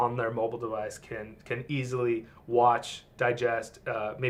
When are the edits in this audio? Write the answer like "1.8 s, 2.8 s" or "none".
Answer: none